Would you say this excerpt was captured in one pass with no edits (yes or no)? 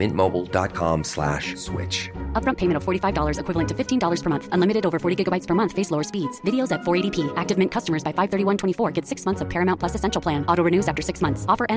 yes